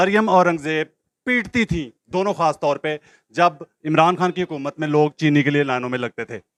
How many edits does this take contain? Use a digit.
0